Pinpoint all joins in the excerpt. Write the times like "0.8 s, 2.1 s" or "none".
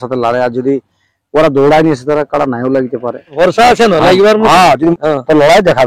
3.3 s, 4.9 s

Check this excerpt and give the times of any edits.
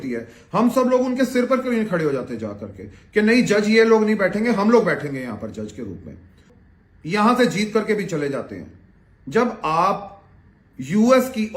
6.4 s

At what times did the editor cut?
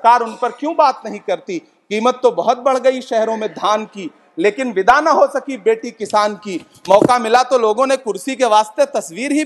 none

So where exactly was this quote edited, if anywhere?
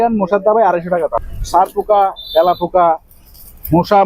1.2 s

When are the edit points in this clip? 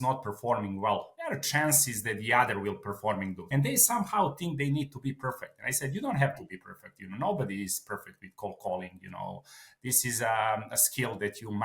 1.1 s, 3.4 s

